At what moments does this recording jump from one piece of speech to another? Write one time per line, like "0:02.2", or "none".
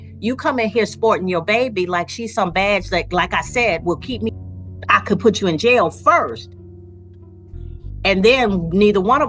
0:04.3